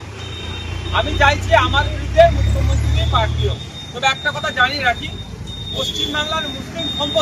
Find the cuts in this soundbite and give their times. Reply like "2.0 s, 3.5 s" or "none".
none